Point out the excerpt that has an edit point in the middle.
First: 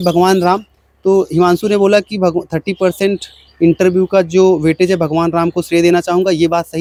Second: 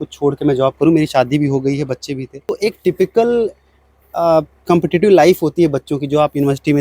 second; 1 cut; at 2.5 s

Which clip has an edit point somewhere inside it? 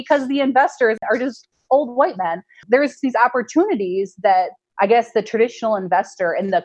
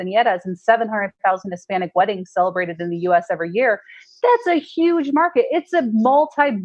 first; 3 cuts; at 1.0 s, 2.7 s, 4.6 s

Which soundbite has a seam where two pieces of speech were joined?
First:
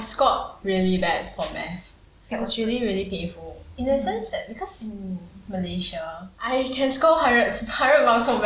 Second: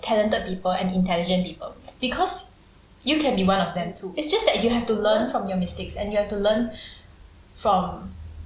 first; 3 cuts; at 2.3 s, 4.9 s, 6.3 s

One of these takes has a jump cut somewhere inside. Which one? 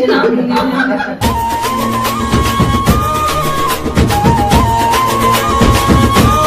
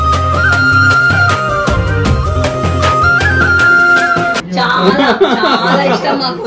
second; 1 cut; at 4.5 s

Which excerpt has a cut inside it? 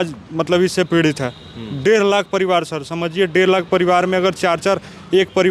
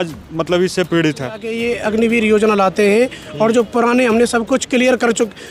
second; 1 cut; at 1.6 s

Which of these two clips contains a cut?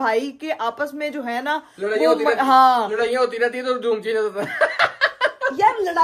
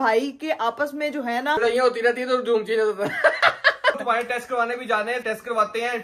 second; 3 cuts; at 1.6 s, 4.0 s, 5.2 s

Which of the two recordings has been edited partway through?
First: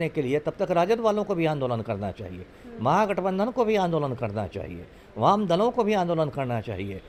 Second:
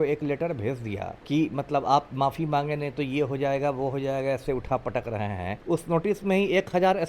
second; 2 cuts; at 1.1 s, 5.5 s

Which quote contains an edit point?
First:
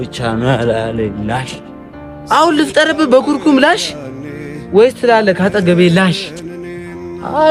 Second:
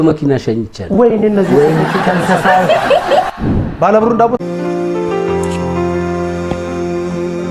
second; 1 cut; at 4.4 s

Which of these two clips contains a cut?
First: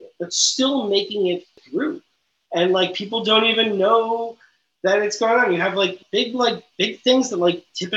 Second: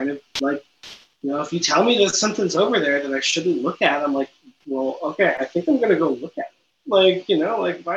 first; 2 cuts; at 1.6 s, 6.0 s

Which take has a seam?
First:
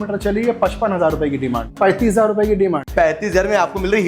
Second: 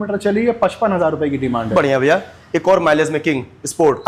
first; 2 cuts; at 1.7 s, 2.9 s

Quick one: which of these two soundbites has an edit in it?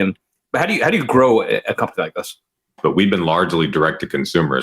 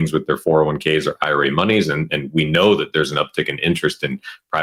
first; 1 cut; at 2.8 s

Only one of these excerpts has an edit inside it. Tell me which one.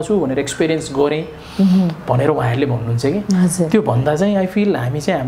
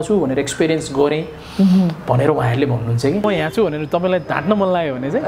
second; 1 cut; at 3.2 s

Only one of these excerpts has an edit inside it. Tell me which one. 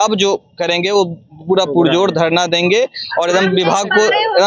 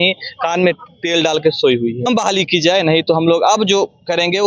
second; 1 cut; at 2.1 s

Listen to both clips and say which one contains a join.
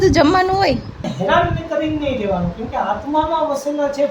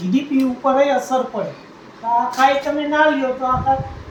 first; 1 cut; at 1.1 s

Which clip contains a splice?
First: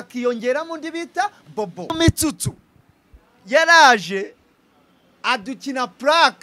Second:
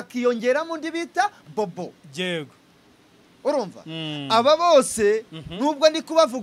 first; 1 cut; at 1.9 s

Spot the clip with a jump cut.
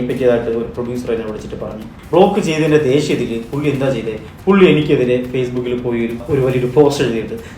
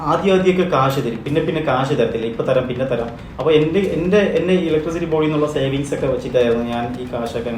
first; 2 cuts; at 1.9 s, 6.2 s

